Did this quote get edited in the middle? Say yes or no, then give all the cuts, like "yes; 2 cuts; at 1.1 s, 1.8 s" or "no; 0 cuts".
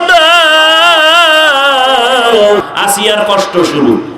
yes; 1 cut; at 2.6 s